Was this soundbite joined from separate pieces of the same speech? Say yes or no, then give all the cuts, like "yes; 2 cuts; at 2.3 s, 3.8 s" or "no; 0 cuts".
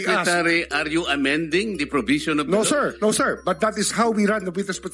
yes; 1 cut; at 2.9 s